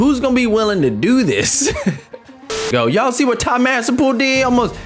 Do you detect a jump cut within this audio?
yes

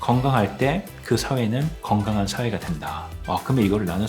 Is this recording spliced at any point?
yes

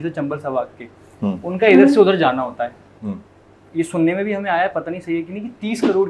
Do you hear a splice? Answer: no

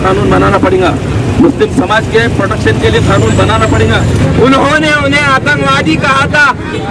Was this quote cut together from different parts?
yes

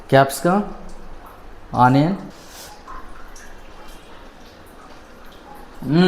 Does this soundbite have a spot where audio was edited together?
yes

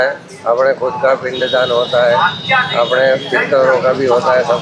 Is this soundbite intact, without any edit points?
yes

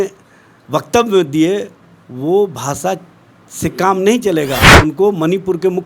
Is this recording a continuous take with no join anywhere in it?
no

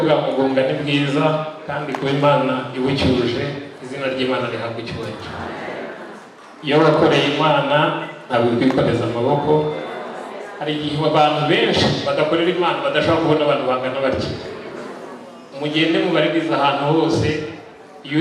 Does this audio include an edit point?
no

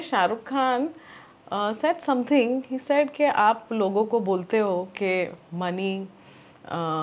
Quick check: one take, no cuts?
yes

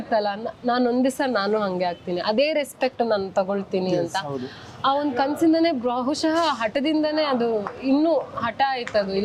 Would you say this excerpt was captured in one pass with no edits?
yes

